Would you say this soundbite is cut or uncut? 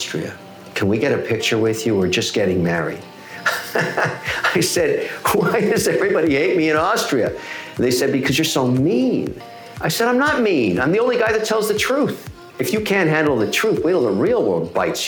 uncut